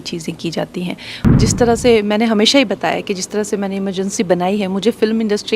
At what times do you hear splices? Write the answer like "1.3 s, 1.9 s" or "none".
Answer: 1.4 s